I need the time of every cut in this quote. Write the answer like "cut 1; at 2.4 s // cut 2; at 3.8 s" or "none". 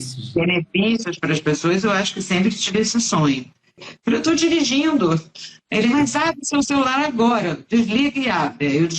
cut 1; at 3.9 s